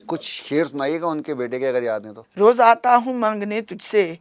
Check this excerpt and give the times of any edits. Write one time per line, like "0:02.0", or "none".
0:02.2

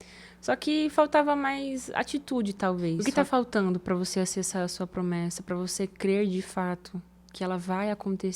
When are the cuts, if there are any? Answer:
0:03.0

